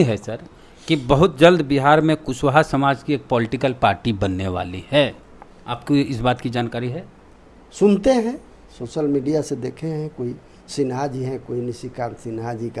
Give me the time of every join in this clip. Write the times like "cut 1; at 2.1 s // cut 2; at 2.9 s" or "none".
none